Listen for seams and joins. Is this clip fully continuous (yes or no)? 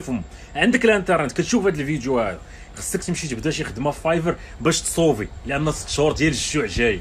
yes